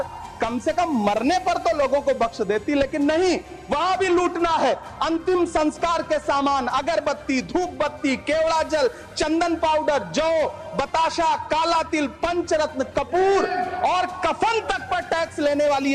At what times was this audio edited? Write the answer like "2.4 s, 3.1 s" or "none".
none